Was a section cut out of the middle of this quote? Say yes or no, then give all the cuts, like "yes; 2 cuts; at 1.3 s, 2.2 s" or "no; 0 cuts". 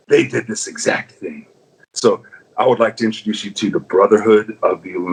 no; 0 cuts